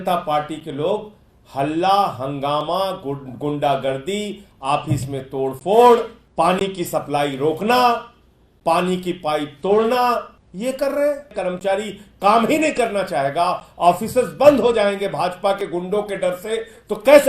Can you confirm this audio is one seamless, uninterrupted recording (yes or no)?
no